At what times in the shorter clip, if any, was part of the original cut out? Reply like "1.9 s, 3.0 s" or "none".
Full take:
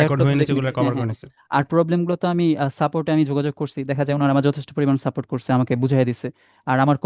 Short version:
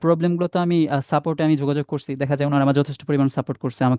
none